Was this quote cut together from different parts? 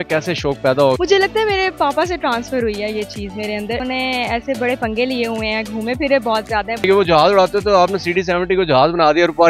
yes; 3 cuts; at 1.0 s, 3.8 s, 6.9 s

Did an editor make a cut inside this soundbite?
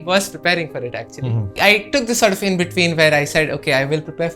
yes; 1 cut; at 1.6 s

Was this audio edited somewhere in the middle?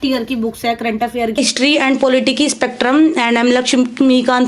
yes; 1 cut; at 1.4 s

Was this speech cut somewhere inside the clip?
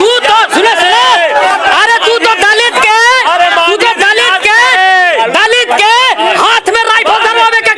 no; 0 cuts

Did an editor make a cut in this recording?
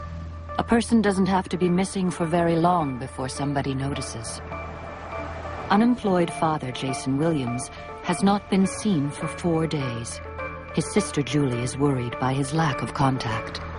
yes; 1 cut; at 7.7 s

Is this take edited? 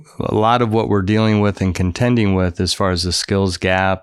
no; 0 cuts

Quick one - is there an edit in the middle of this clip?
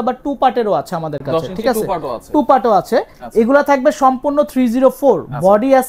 no; 0 cuts

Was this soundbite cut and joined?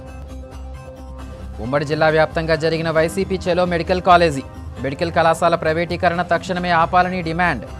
no; 0 cuts

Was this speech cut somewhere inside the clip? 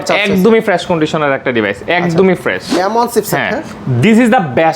yes; 1 cut; at 2.7 s

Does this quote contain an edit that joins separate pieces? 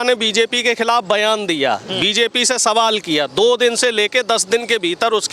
no; 0 cuts

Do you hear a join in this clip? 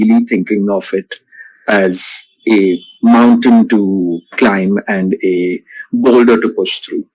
no; 0 cuts

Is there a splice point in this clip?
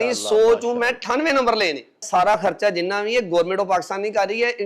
yes; 1 cut; at 2.0 s

